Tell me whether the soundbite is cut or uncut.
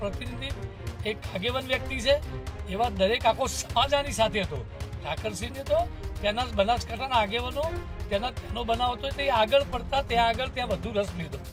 uncut